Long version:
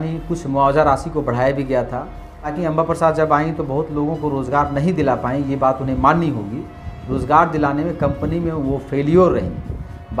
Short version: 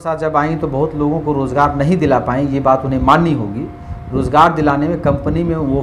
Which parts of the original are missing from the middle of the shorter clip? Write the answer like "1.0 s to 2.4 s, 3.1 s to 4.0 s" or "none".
none